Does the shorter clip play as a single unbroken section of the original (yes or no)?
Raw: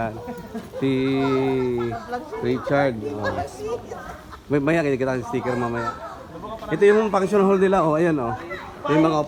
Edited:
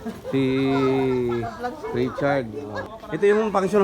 no